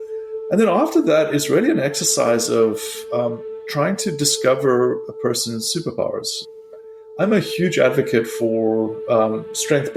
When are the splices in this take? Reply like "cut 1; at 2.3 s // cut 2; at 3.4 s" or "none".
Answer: none